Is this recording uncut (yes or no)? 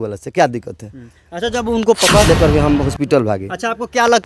no